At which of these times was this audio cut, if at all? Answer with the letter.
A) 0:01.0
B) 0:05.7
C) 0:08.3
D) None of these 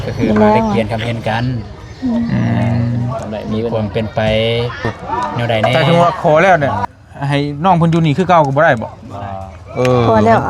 B